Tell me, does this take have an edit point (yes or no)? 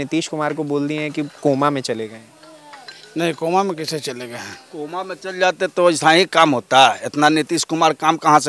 no